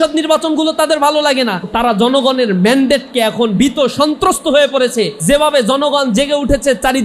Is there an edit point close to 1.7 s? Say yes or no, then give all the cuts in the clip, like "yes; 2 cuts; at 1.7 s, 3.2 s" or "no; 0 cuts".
yes; 2 cuts; at 1.7 s, 5.2 s